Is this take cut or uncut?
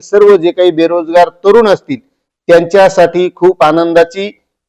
uncut